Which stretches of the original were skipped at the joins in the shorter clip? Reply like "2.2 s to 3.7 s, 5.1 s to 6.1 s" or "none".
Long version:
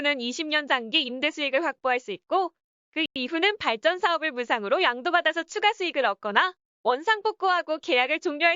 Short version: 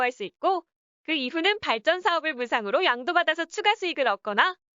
3.1 s to 3.2 s